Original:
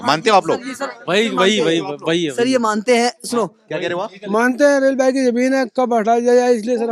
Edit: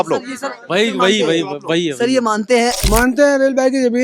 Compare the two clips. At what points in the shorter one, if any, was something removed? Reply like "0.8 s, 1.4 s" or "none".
2.8 s